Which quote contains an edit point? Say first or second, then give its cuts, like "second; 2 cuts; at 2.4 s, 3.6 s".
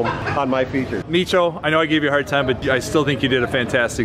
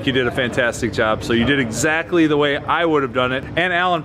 first; 1 cut; at 1.0 s